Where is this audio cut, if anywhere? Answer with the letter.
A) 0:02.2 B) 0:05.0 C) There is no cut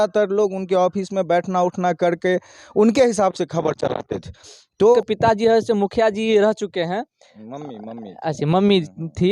B